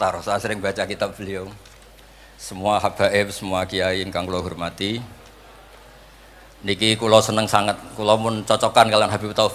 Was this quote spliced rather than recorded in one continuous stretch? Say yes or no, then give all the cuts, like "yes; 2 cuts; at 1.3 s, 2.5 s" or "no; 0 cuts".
no; 0 cuts